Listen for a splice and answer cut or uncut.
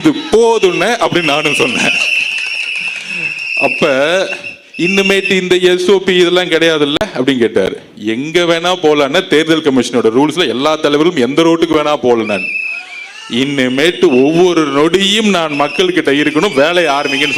uncut